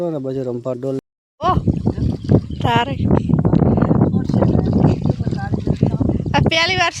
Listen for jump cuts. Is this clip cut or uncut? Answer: cut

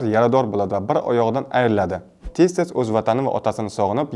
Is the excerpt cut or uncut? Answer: cut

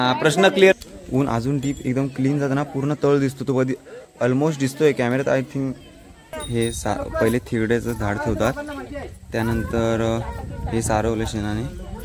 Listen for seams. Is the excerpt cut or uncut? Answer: cut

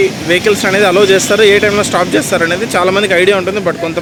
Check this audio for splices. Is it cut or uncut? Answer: uncut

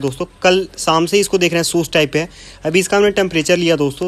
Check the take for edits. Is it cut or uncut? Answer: uncut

